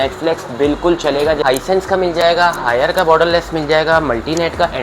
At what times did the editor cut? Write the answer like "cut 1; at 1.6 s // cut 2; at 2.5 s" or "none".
cut 1; at 1.4 s